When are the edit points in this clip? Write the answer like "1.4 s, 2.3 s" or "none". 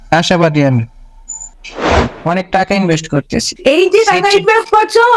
2.0 s